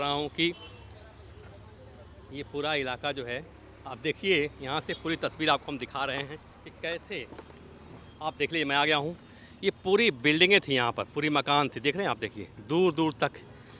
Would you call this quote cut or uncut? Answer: uncut